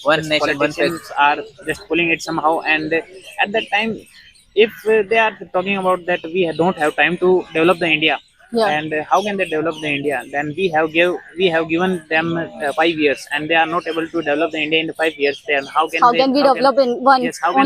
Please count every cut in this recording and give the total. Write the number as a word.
one